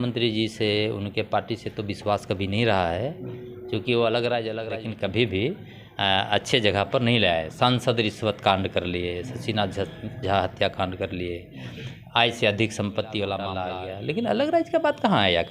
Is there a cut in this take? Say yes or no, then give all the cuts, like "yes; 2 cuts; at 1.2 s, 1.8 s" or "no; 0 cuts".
yes; 2 cuts; at 4.6 s, 13.6 s